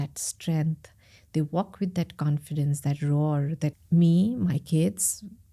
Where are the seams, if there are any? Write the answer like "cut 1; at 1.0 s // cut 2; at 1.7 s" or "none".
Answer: cut 1; at 3.8 s